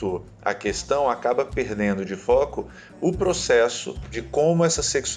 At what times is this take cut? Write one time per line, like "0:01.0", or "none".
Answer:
0:04.2